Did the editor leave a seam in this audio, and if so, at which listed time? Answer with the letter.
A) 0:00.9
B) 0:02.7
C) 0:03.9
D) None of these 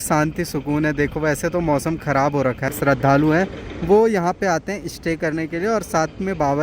B